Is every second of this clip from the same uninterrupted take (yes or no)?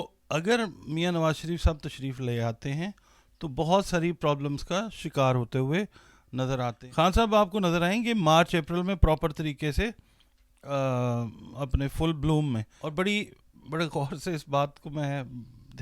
no